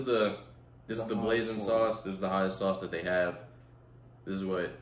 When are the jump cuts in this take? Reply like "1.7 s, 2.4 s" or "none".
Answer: none